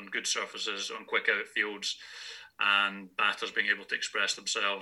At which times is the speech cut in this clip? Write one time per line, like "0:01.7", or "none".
none

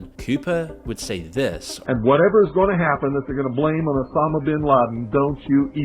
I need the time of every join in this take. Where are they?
0:01.7

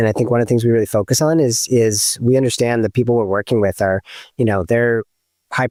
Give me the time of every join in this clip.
none

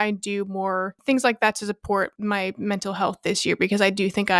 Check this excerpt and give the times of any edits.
0:00.9
0:02.1

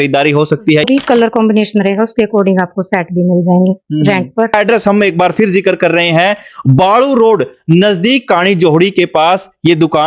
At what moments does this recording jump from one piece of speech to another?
0:00.8
0:04.5

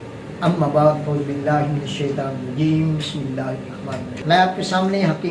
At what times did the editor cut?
0:04.2

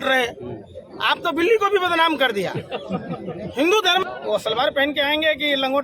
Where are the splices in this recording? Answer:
0:04.0

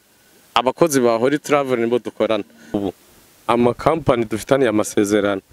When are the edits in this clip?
0:02.8

